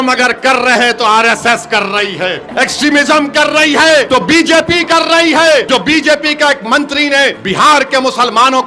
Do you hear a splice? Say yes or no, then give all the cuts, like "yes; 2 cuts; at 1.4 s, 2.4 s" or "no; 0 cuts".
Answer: yes; 4 cuts; at 2.5 s, 4.1 s, 5.7 s, 7.4 s